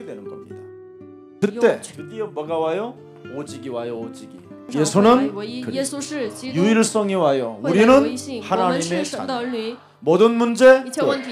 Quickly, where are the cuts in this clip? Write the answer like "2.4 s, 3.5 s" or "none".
none